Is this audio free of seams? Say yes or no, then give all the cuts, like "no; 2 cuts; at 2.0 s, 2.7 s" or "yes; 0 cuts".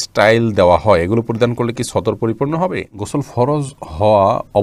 no; 1 cut; at 2.9 s